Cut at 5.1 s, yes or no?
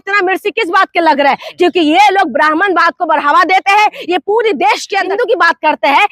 yes